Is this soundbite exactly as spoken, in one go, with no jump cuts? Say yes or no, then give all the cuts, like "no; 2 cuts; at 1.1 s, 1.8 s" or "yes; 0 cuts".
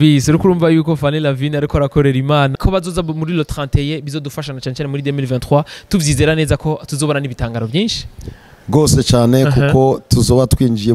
no; 1 cut; at 2.5 s